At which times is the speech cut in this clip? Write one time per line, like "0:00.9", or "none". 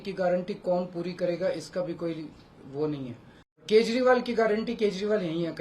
0:03.6

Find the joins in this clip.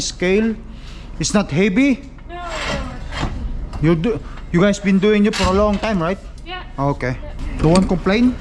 0:07.3

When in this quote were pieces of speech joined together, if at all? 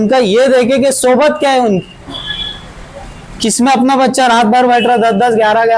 none

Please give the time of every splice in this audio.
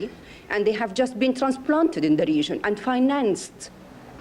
none

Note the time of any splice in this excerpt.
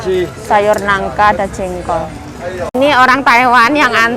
0:02.7

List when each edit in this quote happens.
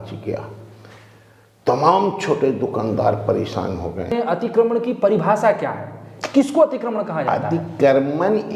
0:04.1

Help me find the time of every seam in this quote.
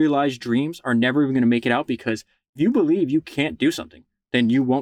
0:02.5

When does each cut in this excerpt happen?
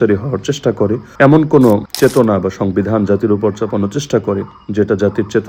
0:01.0
0:01.9

